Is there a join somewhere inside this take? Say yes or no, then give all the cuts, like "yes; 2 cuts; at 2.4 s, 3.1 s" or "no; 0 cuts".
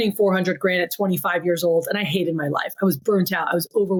no; 0 cuts